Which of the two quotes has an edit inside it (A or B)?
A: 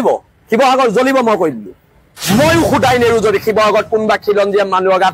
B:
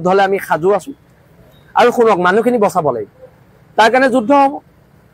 A